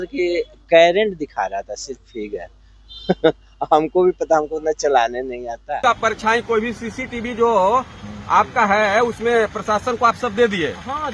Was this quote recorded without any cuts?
no; 1 cut; at 5.8 s

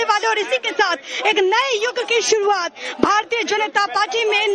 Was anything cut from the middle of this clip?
yes; 1 cut; at 1.5 s

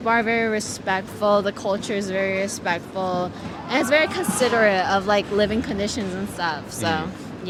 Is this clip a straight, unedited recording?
yes; 0 cuts

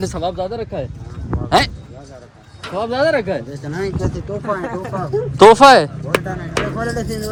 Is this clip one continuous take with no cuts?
yes; 0 cuts

